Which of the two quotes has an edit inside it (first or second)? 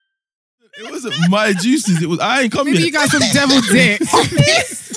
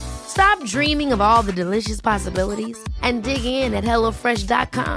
first